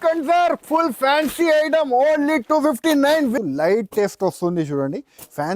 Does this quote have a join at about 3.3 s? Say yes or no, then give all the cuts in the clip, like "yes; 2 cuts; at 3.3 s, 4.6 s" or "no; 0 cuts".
yes; 1 cut; at 3.3 s